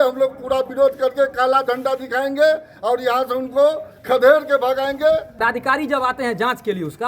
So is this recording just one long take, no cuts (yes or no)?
no